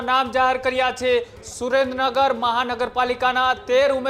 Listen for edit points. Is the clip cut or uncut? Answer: cut